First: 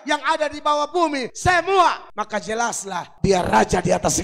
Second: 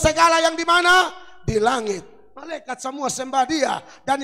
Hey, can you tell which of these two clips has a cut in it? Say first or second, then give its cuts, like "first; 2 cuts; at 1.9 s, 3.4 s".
first; 3 cuts; at 1.3 s, 2.1 s, 3.1 s